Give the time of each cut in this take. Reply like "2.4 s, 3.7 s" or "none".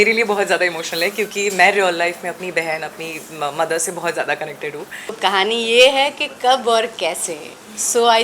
5.2 s